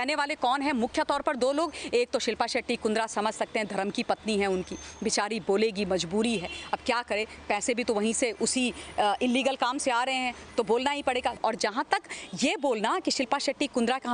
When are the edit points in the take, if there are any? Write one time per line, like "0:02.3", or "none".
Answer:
0:11.4